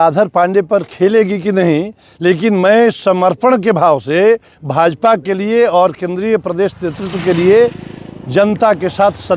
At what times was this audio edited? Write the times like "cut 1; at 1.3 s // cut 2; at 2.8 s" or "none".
none

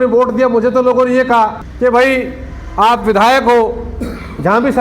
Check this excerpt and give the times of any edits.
cut 1; at 1.6 s

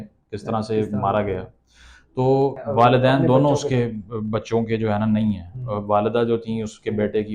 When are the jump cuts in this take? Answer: cut 1; at 2.6 s

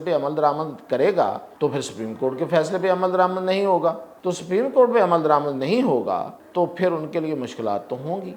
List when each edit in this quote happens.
cut 1; at 1.5 s // cut 2; at 4.1 s // cut 3; at 6.4 s

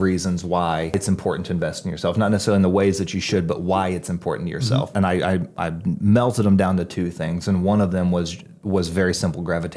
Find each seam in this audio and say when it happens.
cut 1; at 0.9 s // cut 2; at 4.9 s

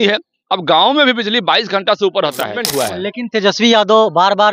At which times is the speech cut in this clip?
cut 1; at 2.6 s

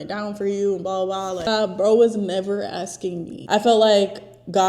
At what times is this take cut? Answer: cut 1; at 1.5 s // cut 2; at 3.3 s

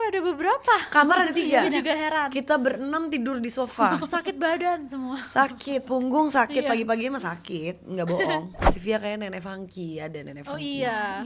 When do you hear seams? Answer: cut 1; at 8.6 s

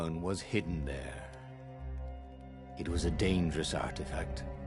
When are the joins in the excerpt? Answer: none

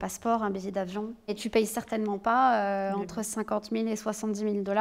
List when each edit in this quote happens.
cut 1; at 1.4 s

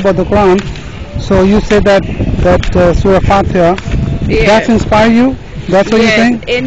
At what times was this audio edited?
none

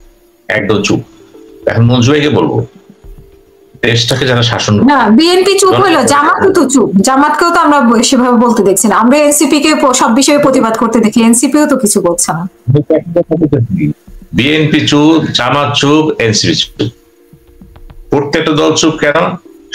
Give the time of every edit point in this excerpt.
none

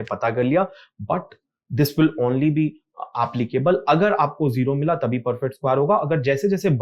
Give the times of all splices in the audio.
none

